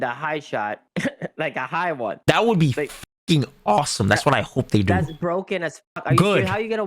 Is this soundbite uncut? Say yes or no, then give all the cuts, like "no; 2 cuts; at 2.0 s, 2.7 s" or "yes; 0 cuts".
no; 2 cuts; at 0.8 s, 2.2 s